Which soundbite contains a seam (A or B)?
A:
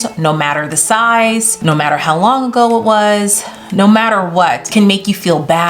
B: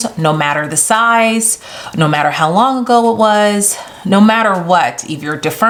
A